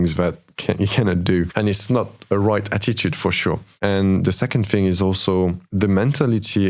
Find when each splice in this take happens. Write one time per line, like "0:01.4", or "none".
0:01.5
0:03.7
0:05.6

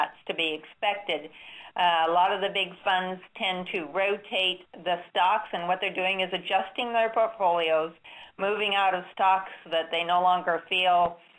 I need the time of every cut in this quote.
0:02.6

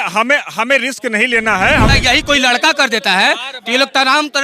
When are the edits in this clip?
0:01.9

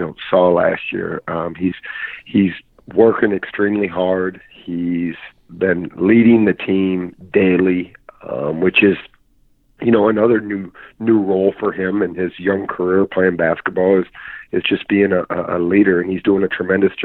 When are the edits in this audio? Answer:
none

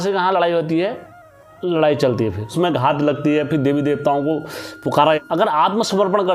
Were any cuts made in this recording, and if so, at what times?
0:02.5
0:05.2

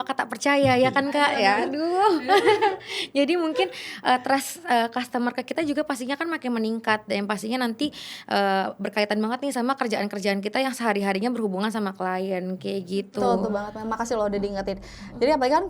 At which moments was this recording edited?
none

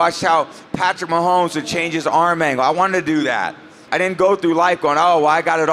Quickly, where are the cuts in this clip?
0:03.8

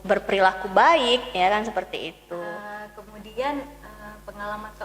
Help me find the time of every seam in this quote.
0:02.6

